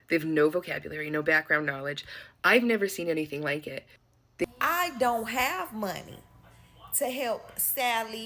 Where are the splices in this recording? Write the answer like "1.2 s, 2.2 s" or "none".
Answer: 4.4 s